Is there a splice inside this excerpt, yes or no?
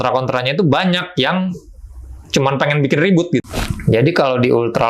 yes